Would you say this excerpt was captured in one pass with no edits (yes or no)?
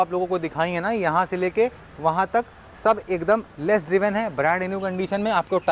yes